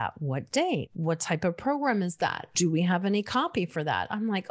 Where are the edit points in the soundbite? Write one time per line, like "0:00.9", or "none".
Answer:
0:00.9
0:02.5